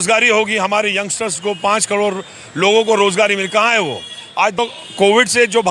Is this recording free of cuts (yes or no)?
no